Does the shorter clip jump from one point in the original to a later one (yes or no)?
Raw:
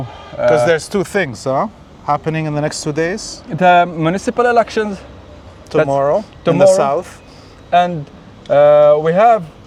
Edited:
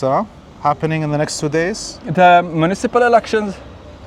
no